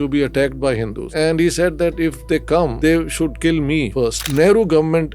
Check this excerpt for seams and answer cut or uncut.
cut